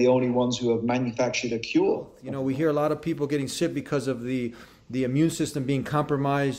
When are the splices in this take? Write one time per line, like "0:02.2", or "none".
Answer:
0:02.2

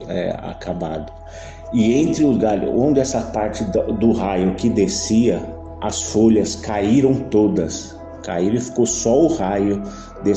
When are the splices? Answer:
0:01.2

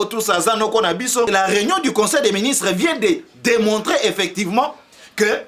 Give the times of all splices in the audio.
0:01.3

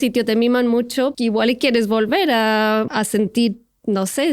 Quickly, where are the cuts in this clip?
0:01.2
0:02.9

